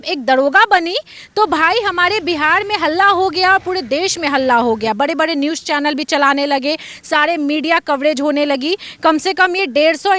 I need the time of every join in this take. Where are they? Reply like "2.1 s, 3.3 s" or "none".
none